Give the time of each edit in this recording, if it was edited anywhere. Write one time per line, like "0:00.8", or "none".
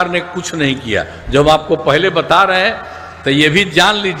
none